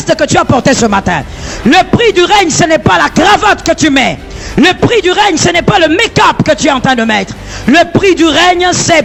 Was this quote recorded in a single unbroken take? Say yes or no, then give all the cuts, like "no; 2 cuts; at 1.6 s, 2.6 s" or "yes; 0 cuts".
yes; 0 cuts